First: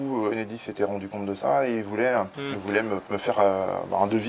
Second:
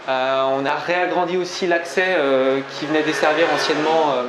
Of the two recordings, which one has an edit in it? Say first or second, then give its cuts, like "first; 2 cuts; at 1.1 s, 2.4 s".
first; 1 cut; at 2.8 s